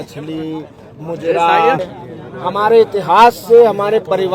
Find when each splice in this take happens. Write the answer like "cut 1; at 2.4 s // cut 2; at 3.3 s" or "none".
cut 1; at 1.8 s